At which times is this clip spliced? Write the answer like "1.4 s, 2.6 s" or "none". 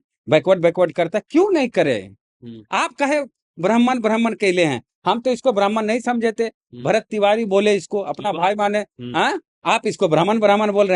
9.5 s

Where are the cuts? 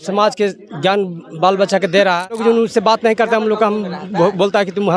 2.4 s

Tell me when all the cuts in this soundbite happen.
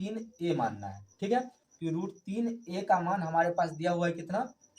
1.6 s

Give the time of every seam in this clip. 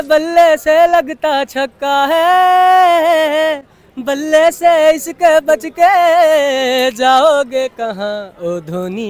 none

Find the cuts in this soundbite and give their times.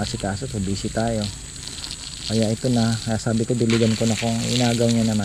none

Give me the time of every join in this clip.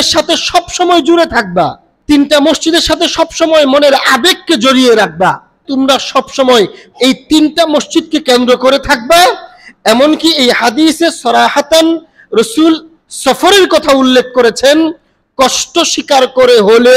1.9 s, 5.6 s

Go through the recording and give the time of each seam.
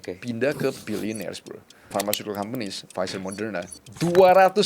1.9 s

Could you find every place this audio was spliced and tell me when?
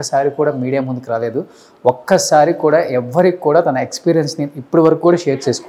none

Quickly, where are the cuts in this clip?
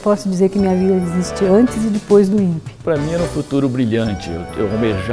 2.7 s

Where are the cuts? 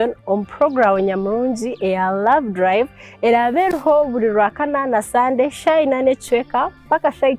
6.3 s

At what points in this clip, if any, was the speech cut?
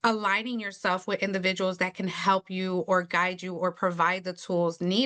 none

